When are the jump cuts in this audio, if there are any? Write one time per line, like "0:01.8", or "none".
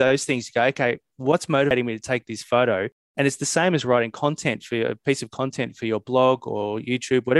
0:01.7